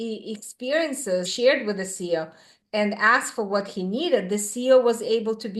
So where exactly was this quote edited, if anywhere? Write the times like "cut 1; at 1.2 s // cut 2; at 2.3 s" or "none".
cut 1; at 1.3 s // cut 2; at 2.5 s